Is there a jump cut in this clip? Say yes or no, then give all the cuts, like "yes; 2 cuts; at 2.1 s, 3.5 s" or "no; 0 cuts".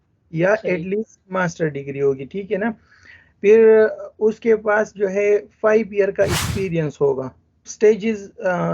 yes; 1 cut; at 7.7 s